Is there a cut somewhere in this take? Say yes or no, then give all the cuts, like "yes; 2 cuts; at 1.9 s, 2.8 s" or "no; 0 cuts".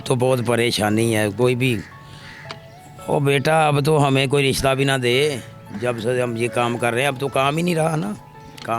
no; 0 cuts